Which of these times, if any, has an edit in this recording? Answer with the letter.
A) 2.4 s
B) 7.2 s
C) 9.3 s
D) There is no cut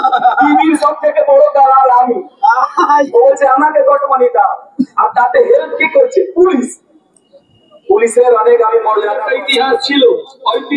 C